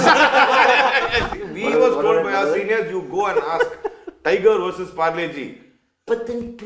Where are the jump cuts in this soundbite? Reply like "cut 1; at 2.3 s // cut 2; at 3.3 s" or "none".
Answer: cut 1; at 1.3 s